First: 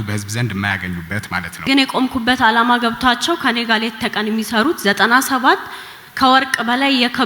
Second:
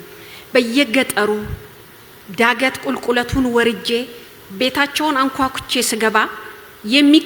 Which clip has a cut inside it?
first; 1 cut; at 1.5 s

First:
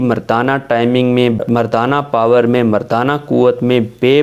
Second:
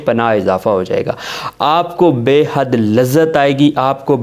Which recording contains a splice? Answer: first; 1 cut; at 1.4 s

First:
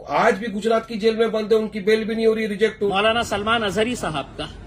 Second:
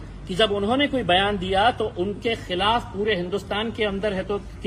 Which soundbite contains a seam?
first; 1 cut; at 2.8 s

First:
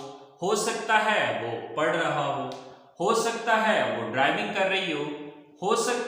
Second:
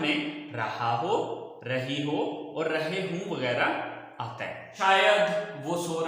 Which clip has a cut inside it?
second; 1 cut; at 4.6 s

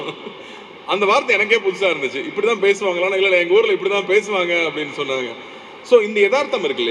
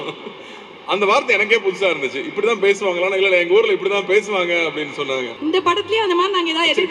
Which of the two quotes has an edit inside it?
second; 1 cut; at 5.3 s

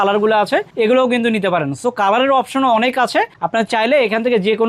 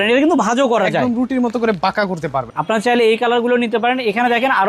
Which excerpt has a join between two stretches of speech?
second; 1 cut; at 2.5 s

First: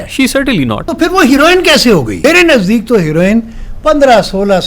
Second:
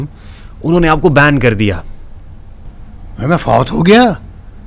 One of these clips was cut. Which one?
first; 2 cuts; at 0.8 s, 2.1 s

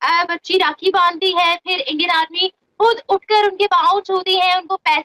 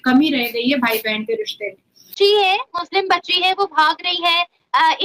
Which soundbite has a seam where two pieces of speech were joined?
second; 1 cut; at 2.0 s

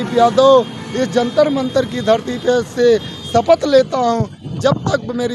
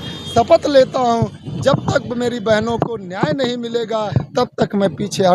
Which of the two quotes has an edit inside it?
second; 1 cut; at 4.2 s

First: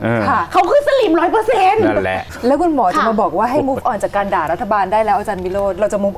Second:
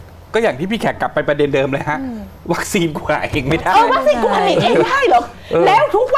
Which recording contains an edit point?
first; 1 cut; at 2.2 s

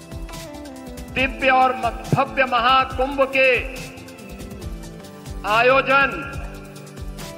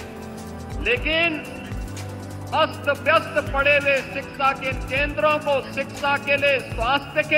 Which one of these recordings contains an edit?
first; 1 cut; at 6.3 s

